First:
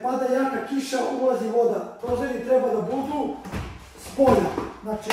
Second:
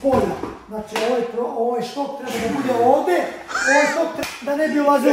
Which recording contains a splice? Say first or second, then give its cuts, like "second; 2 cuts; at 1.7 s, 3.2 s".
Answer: second; 1 cut; at 4.1 s